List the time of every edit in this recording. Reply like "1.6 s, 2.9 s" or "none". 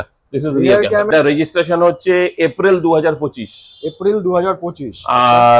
1.1 s